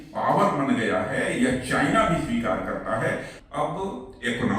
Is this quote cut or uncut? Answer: cut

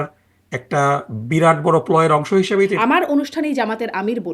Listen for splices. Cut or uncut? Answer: cut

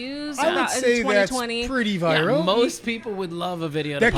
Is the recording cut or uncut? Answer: uncut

